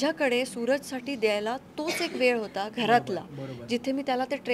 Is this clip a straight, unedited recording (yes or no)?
yes